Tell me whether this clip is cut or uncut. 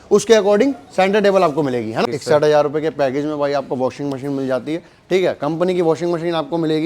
cut